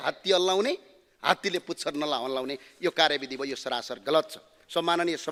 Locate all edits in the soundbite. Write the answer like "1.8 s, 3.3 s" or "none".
none